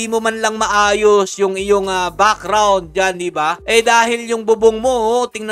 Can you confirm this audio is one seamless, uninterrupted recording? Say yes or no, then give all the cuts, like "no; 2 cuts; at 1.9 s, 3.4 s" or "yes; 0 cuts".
yes; 0 cuts